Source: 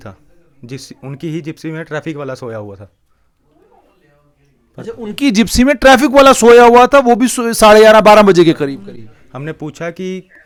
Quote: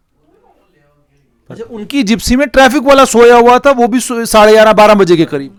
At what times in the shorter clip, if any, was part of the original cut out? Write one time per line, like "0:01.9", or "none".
none